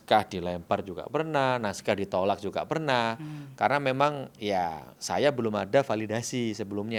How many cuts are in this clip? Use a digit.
0